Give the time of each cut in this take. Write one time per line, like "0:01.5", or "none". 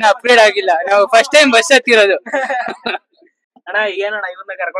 none